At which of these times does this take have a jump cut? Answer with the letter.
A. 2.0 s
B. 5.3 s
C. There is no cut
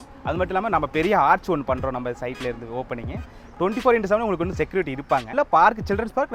B